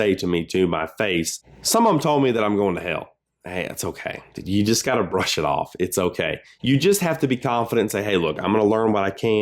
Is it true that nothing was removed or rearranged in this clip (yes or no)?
no